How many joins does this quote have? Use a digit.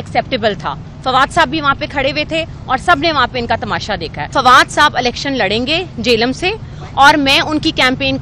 1